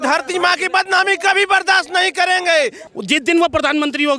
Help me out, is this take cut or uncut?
cut